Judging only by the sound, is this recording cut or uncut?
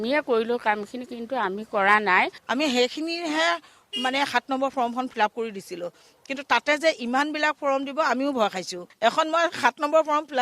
cut